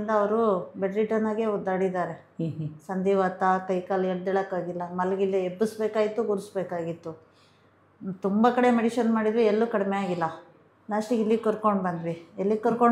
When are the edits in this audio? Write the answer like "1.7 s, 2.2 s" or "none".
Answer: none